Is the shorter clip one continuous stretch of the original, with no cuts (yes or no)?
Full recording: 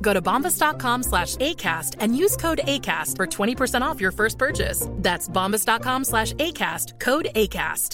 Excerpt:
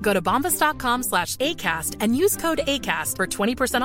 yes